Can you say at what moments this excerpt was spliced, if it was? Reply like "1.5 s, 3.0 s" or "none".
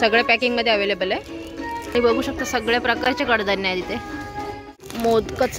none